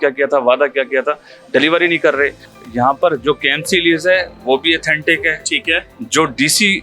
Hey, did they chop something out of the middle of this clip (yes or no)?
yes